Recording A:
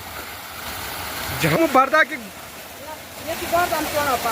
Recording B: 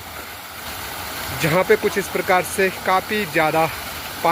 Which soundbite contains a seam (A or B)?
A